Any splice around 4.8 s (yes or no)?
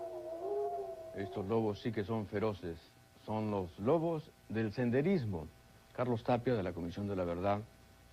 no